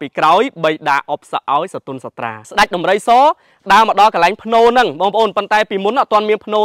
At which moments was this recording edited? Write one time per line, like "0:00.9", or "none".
0:02.4